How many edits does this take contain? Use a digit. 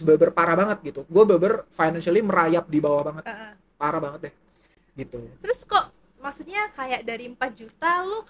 0